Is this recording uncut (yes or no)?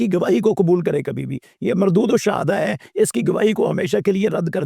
yes